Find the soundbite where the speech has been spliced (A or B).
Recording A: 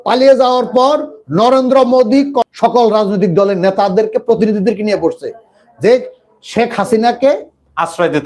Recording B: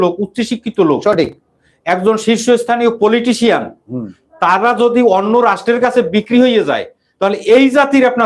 A